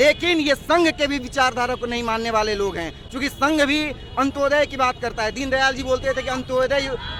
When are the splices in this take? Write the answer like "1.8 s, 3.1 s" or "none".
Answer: none